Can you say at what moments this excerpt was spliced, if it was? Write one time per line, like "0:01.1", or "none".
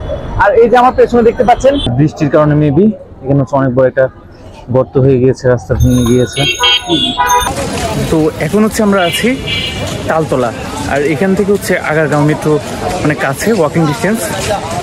0:01.8
0:07.4